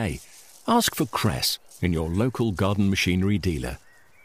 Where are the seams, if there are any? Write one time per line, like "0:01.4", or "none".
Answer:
none